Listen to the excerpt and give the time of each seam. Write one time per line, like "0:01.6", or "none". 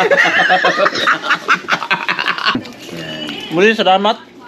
0:02.6